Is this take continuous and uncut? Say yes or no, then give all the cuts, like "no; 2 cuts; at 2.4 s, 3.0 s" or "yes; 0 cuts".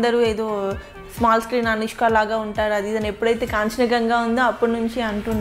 yes; 0 cuts